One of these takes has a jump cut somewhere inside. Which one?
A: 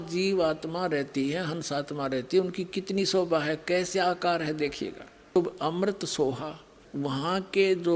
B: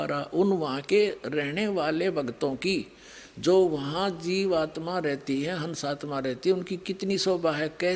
A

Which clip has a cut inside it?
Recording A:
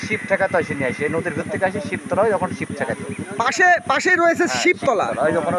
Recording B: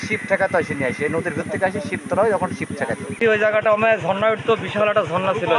B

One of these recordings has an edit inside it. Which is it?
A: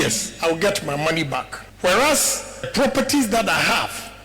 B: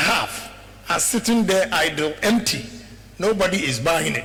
A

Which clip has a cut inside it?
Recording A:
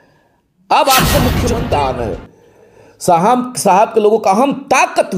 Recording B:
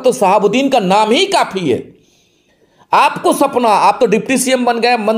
A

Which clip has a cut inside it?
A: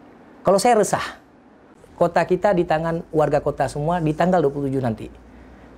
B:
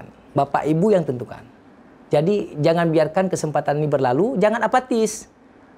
A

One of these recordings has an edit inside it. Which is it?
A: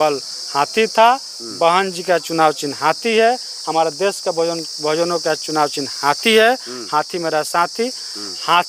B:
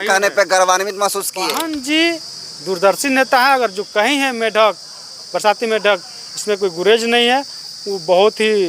B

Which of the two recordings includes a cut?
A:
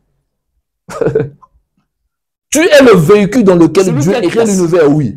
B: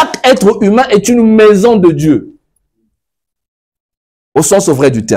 A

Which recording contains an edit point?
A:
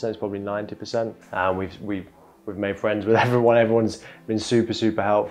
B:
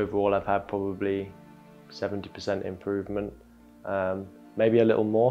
A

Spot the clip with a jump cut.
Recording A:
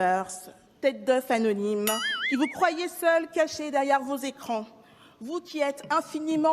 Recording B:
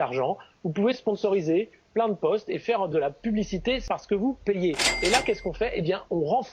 B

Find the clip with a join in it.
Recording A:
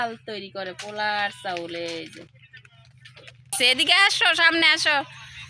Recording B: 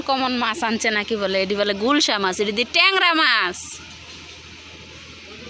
A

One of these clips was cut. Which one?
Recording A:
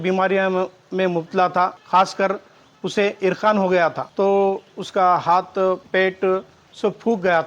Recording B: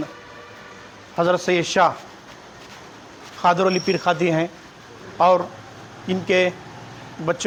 A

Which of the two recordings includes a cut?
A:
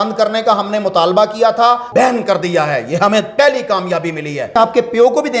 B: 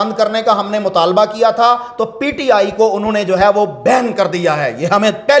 A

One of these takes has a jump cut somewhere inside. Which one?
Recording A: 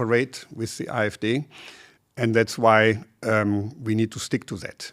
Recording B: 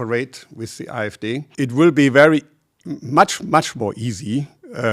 B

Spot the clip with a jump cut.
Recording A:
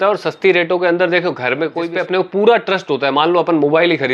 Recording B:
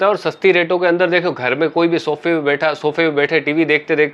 A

